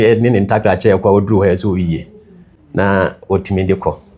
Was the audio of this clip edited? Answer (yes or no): no